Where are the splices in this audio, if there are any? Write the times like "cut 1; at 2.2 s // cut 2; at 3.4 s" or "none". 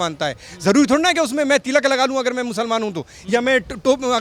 none